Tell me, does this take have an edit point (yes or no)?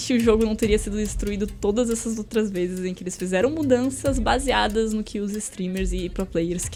no